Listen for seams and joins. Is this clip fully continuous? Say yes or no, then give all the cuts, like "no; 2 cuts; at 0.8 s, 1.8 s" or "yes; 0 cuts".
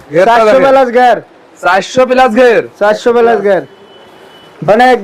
yes; 0 cuts